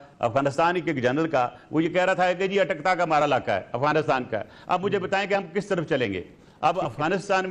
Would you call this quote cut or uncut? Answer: uncut